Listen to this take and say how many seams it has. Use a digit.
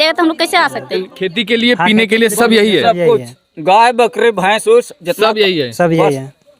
1